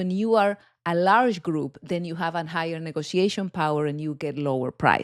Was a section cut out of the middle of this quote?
no; 0 cuts

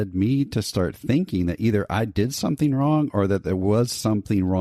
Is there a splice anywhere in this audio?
no; 0 cuts

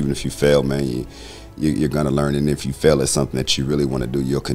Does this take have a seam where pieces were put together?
no; 0 cuts

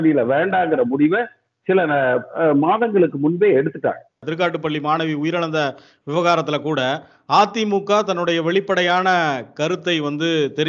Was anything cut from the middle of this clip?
yes; 1 cut; at 4.2 s

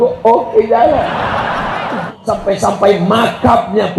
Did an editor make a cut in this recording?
yes; 1 cut; at 2.1 s

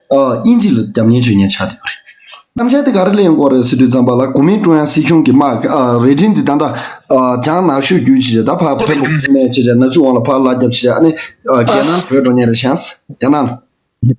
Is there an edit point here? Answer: yes; 1 cut; at 2.6 s

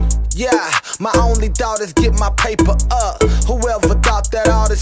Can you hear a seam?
no; 0 cuts

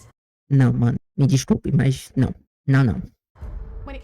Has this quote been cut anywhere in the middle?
no; 0 cuts

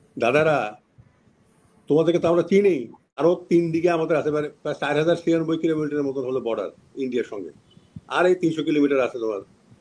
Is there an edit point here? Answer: yes; 1 cut; at 3.1 s

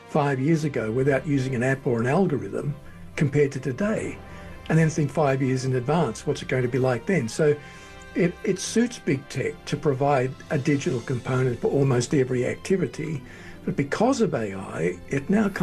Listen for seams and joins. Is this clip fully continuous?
yes; 0 cuts

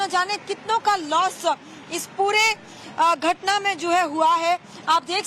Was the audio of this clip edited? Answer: yes; 1 cut; at 2.4 s

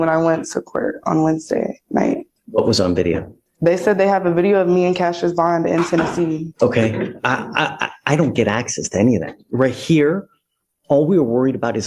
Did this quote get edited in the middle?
yes; 2 cuts; at 2.3 s, 6.5 s

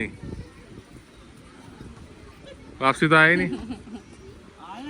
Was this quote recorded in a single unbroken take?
yes; 0 cuts

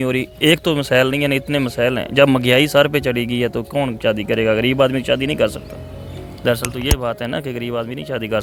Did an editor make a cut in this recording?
no; 0 cuts

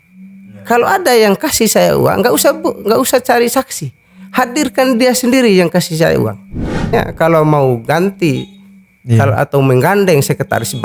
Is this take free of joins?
no; 1 cut; at 6.9 s

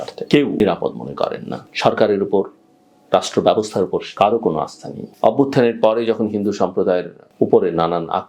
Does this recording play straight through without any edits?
no; 1 cut; at 5.0 s

